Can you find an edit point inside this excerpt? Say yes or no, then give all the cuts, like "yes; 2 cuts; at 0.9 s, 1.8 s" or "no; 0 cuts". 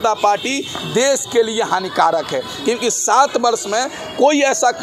no; 0 cuts